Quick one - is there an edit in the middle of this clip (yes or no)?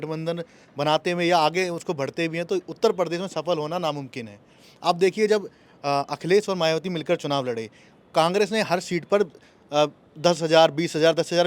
no